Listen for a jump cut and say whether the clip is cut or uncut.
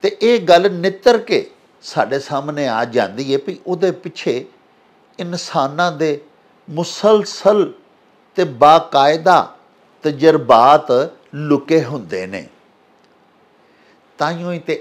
uncut